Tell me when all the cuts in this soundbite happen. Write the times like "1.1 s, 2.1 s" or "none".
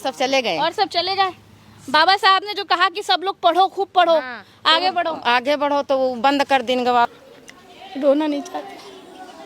7.1 s